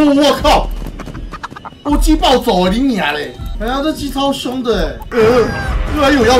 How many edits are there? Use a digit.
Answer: 2